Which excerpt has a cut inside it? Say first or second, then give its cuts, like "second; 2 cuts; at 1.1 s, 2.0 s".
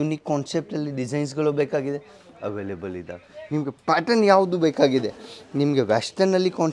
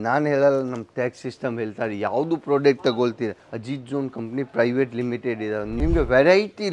second; 2 cuts; at 3.5 s, 5.7 s